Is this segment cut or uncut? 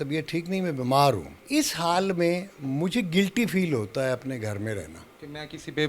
cut